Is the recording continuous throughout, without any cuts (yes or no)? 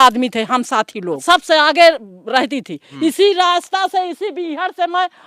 no